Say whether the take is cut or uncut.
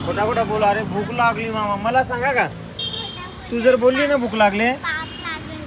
uncut